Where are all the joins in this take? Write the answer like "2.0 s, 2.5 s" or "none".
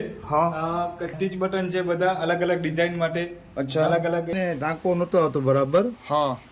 1.1 s, 4.3 s

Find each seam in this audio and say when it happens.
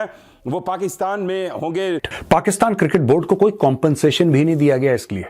2.1 s

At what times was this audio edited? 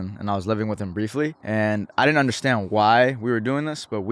1.4 s

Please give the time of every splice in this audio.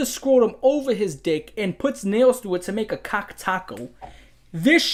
none

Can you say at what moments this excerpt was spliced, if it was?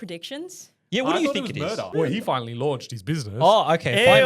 1.9 s

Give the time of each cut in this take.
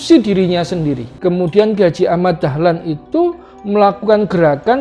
1.1 s

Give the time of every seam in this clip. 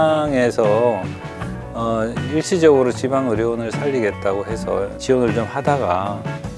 5.0 s

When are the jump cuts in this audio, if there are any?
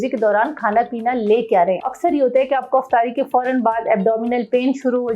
1.9 s

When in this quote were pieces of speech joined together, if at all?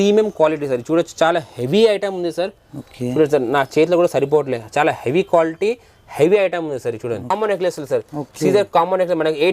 7.3 s

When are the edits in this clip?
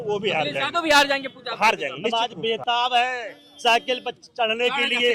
2.1 s

